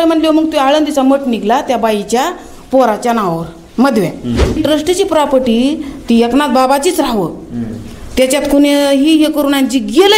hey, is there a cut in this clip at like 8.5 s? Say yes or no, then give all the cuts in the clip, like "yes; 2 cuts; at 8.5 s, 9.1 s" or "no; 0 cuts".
no; 1 cut; at 4.6 s